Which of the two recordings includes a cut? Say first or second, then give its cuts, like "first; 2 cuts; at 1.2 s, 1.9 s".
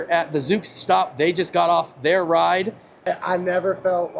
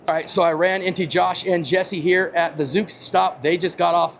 first; 1 cut; at 2.9 s